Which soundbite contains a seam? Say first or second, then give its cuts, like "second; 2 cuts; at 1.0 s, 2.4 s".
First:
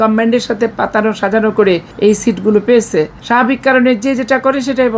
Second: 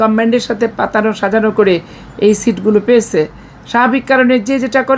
first; 2 cuts; at 1.9 s, 3.2 s